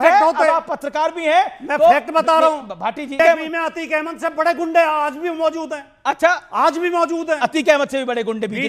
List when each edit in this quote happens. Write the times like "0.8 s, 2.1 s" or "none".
3.2 s